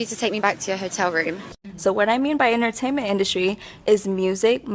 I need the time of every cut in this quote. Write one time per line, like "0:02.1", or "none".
0:01.4